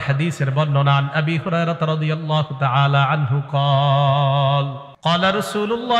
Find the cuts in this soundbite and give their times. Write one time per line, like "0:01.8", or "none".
0:04.8